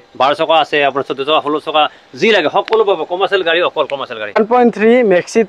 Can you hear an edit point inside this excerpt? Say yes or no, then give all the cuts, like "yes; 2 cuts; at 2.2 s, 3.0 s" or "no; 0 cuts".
yes; 1 cut; at 4.4 s